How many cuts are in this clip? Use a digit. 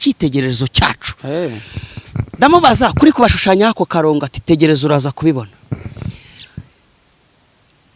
0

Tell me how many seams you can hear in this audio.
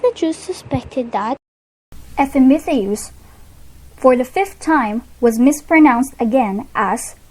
0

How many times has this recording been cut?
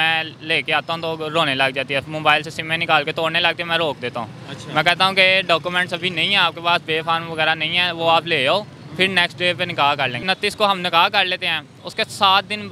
1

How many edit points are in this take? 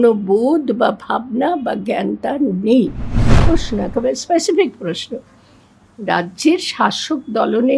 1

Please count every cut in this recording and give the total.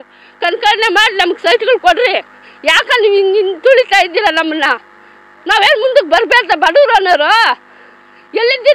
0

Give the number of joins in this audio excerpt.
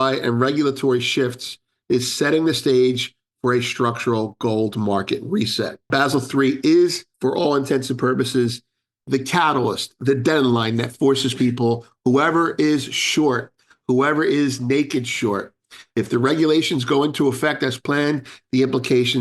2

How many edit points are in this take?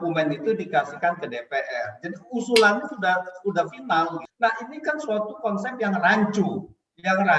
1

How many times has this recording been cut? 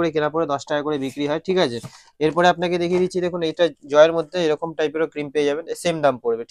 0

